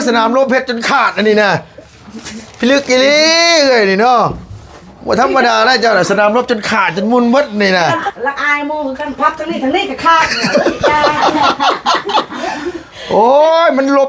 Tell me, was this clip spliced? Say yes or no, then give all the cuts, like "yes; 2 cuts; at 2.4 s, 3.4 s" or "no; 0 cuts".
yes; 1 cut; at 8.1 s